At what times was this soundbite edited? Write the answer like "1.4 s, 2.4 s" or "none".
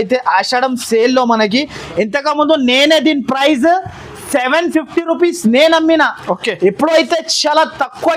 none